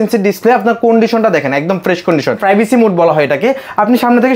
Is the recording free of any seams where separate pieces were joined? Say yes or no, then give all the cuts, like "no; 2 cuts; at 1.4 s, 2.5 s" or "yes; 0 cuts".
no; 1 cut; at 2.4 s